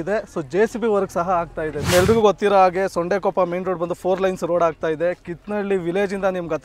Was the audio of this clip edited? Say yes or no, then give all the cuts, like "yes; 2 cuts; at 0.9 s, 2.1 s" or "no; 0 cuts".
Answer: yes; 1 cut; at 1.9 s